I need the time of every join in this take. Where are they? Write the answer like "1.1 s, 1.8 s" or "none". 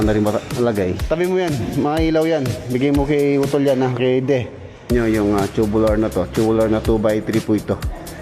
1.0 s, 4.9 s